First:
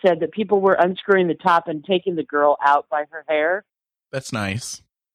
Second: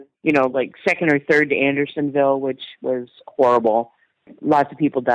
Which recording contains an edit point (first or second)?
second